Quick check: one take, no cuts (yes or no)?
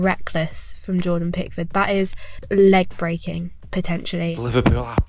no